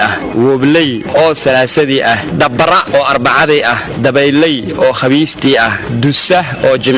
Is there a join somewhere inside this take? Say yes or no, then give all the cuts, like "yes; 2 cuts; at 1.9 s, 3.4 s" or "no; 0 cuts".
yes; 1 cut; at 2.5 s